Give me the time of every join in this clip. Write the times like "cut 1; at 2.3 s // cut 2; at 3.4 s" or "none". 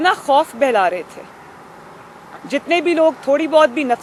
none